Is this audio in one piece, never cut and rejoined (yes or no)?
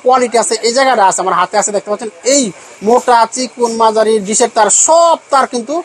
yes